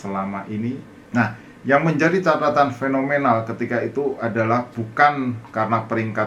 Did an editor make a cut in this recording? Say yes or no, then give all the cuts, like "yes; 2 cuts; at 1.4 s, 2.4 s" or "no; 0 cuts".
yes; 1 cut; at 1.0 s